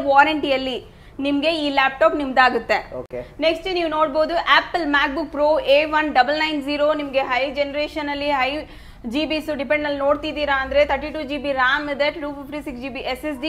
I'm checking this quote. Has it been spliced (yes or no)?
no